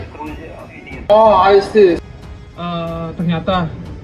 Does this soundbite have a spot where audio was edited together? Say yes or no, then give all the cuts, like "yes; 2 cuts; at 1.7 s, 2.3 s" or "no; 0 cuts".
yes; 1 cut; at 2.0 s